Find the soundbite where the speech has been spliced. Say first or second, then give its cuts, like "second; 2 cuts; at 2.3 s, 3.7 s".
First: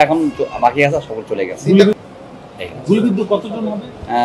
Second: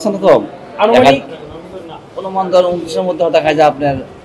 first; 1 cut; at 2.0 s